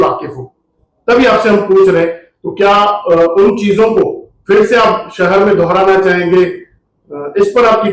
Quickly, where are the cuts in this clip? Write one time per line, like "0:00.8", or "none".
none